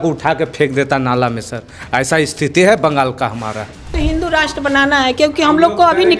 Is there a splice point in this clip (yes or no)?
yes